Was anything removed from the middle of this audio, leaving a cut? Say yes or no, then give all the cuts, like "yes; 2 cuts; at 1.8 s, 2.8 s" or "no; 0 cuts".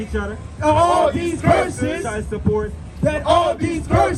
no; 0 cuts